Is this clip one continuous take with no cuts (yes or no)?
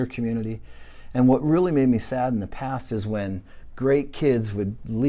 yes